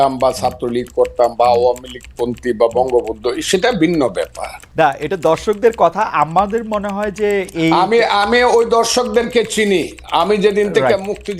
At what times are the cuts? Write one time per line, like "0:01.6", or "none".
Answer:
0:04.7